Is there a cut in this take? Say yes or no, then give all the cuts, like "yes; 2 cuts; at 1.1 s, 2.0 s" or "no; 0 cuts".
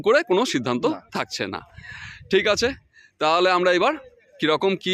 no; 0 cuts